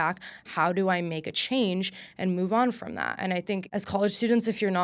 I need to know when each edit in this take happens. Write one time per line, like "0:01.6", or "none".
0:03.6